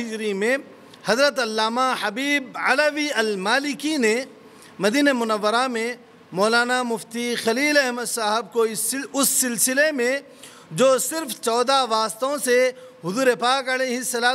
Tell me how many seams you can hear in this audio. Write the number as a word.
zero